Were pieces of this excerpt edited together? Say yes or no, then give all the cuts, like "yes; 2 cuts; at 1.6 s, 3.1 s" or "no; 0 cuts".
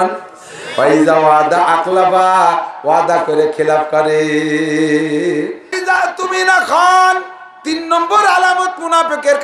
yes; 1 cut; at 5.8 s